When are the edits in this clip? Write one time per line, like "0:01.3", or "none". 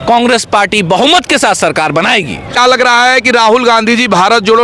none